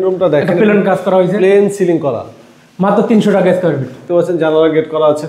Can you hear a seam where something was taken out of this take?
yes; 1 cut; at 4.0 s

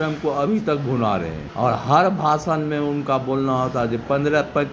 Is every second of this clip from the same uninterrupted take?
no; 1 cut; at 1.4 s

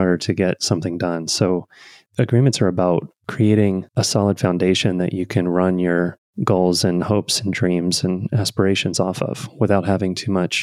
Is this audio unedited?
no; 1 cut; at 6.3 s

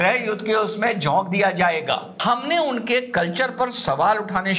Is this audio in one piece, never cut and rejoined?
no; 1 cut; at 2.1 s

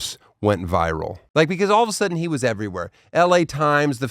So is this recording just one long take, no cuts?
no; 1 cut; at 1.2 s

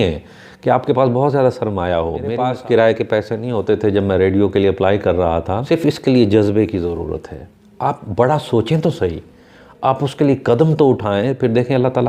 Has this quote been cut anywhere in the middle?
yes; 2 cuts; at 2.3 s, 5.6 s

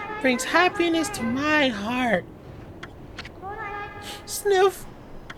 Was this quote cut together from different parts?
no; 0 cuts

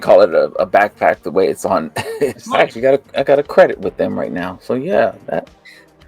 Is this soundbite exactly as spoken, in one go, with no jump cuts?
no; 1 cut; at 2.4 s

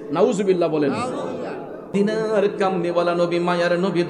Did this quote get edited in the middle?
yes; 1 cut; at 1.9 s

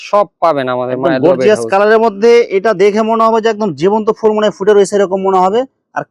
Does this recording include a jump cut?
no; 0 cuts

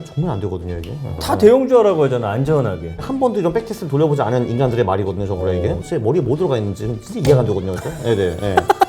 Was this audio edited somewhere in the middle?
yes; 3 cuts; at 1.2 s, 3.0 s, 5.8 s

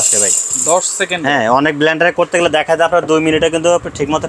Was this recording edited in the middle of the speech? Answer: no; 0 cuts

